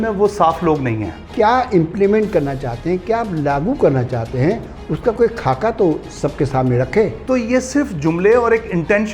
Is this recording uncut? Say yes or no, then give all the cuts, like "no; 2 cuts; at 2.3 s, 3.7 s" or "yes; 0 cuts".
no; 2 cuts; at 1.2 s, 7.2 s